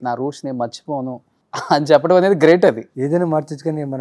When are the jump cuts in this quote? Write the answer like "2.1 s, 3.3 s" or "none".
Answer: 1.3 s, 2.9 s